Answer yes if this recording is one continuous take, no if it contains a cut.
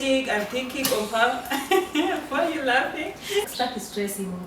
no